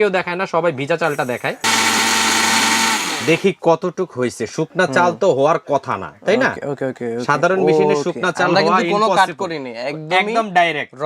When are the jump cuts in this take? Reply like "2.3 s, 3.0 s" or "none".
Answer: 1.6 s, 3.1 s